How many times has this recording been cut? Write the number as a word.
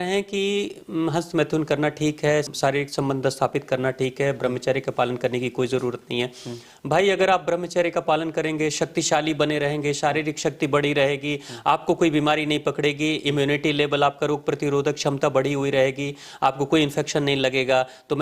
one